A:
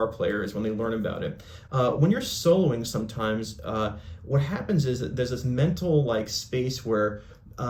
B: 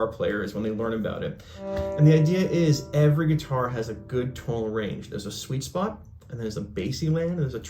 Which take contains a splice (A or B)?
B